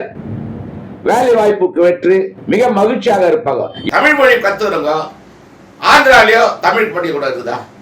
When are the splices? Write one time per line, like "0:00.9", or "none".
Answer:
0:03.8